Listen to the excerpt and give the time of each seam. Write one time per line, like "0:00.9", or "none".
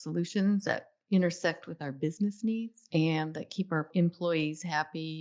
0:02.8
0:03.9